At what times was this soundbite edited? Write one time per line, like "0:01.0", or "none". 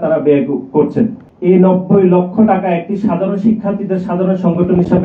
0:01.3